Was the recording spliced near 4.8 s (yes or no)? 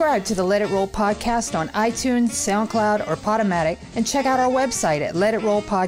no